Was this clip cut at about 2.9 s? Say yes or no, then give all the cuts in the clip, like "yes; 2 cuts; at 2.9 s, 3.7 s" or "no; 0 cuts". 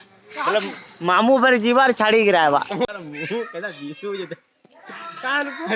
yes; 1 cut; at 2.9 s